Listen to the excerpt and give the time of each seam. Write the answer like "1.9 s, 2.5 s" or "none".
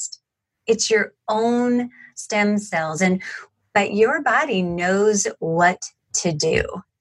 3.3 s